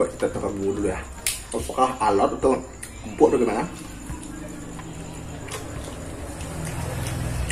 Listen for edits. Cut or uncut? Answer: uncut